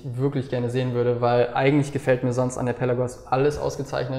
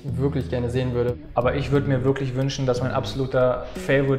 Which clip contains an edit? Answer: second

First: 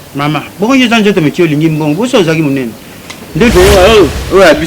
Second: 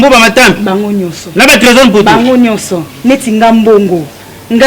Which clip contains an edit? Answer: first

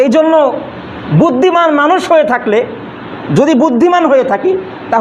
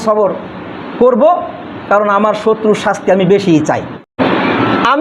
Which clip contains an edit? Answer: second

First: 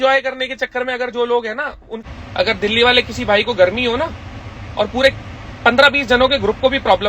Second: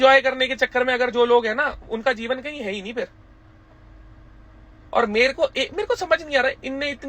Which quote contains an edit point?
first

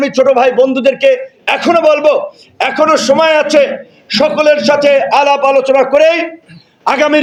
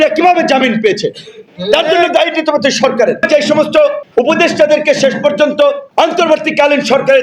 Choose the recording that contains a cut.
second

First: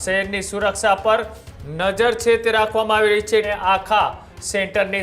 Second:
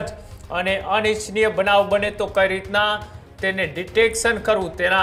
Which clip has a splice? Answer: first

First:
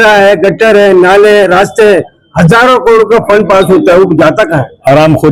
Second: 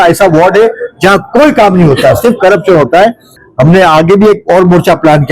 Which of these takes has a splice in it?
second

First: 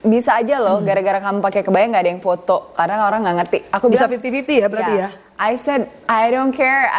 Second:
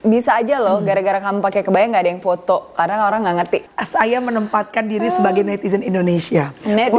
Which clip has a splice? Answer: second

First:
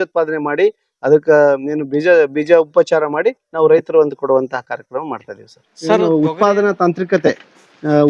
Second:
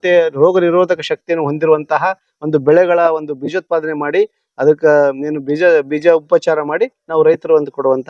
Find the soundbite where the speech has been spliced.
first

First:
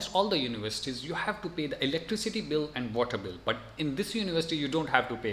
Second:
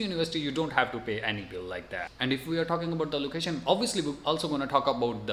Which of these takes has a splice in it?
second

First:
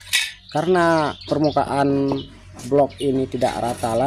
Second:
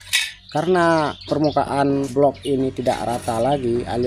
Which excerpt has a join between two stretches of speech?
second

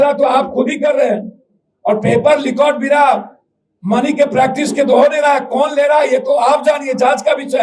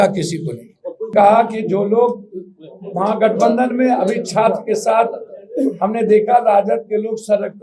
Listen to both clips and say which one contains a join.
second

